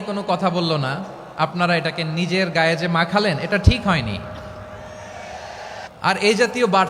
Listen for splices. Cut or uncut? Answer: cut